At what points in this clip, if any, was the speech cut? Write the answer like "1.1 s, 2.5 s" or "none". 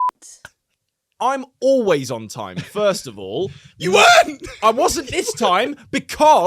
1.0 s